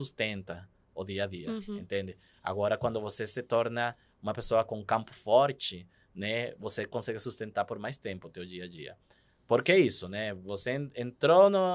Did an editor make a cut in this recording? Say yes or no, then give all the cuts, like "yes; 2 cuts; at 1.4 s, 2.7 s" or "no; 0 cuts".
no; 0 cuts